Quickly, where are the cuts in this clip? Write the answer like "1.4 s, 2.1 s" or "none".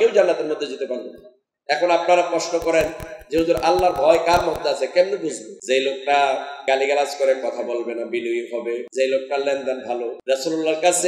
5.5 s, 6.5 s, 8.9 s, 10.2 s

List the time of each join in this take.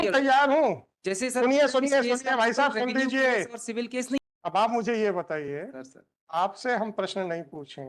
4.2 s

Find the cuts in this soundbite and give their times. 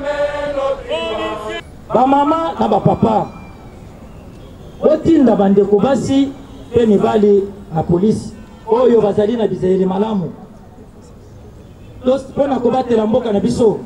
1.7 s

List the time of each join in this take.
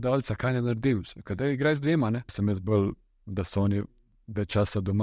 2.3 s

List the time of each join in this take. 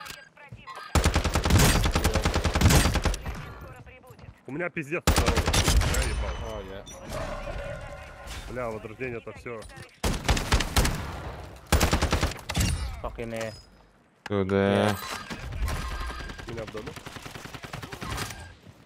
none

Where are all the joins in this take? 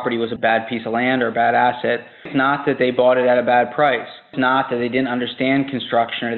2.3 s, 4.3 s

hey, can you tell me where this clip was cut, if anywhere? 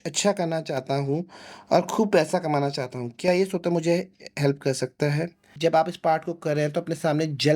5.5 s

